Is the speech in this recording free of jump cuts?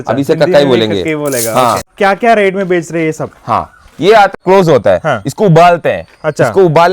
no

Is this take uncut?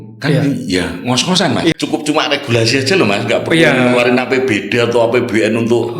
no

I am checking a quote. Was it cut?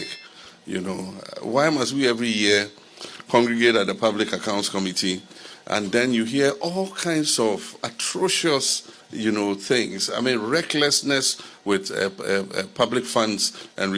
no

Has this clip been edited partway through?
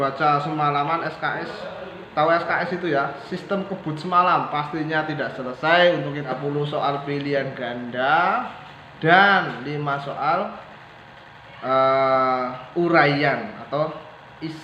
yes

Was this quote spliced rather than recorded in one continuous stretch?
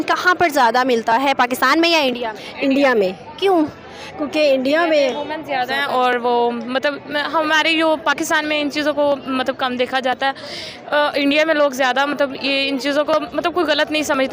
no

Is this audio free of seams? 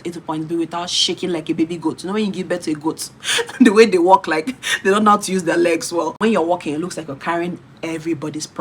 no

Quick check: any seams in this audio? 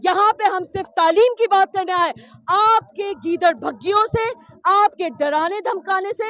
no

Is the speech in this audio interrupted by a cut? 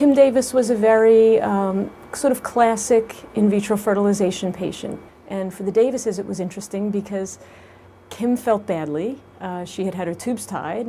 yes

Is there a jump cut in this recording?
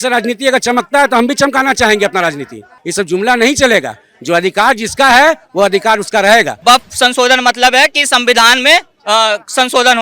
yes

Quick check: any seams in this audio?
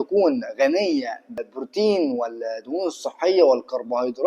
yes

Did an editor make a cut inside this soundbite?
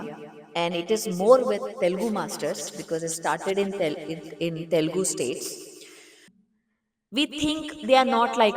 yes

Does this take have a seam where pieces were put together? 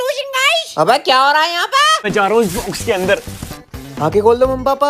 yes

